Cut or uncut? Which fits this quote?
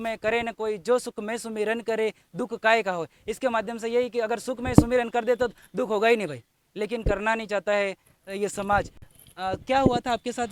uncut